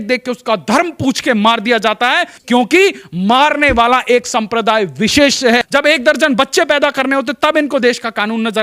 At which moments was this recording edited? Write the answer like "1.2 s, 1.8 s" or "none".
2.3 s, 5.7 s